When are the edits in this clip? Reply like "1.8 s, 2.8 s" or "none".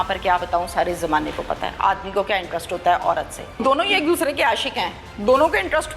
3.6 s